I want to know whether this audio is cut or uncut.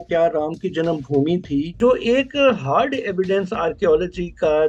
cut